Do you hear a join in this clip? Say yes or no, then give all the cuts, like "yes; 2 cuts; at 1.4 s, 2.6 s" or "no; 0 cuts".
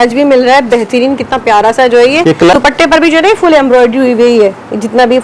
yes; 1 cut; at 2.5 s